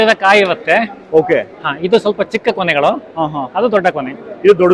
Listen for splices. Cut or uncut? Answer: uncut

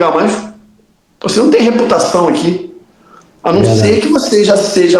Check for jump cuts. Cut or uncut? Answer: uncut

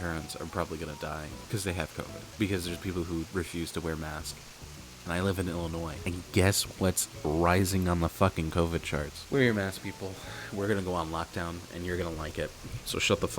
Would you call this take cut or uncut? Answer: cut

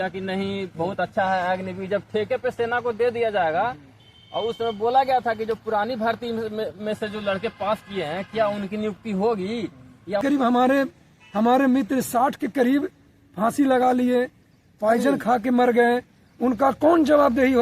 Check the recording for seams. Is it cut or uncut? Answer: cut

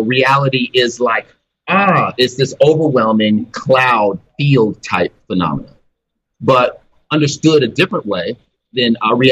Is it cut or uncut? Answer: uncut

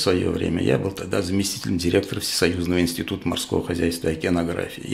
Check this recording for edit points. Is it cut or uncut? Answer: uncut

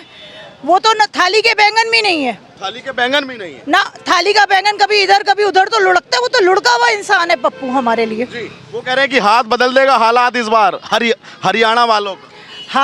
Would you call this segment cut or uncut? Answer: uncut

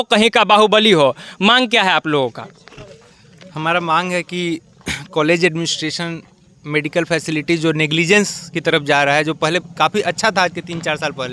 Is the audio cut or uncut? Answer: uncut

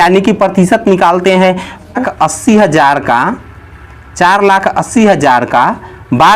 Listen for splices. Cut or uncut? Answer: cut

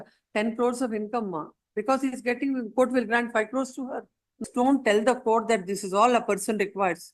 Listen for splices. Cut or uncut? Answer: cut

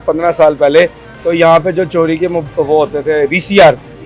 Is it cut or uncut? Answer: uncut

